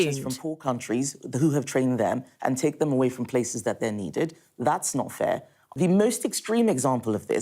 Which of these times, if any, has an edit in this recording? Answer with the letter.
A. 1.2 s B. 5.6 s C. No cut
B